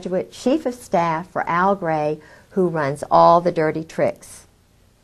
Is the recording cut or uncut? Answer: uncut